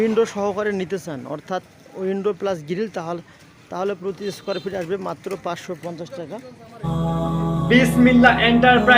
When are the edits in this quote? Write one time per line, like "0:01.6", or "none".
0:06.8